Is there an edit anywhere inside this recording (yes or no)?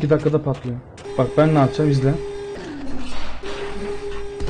yes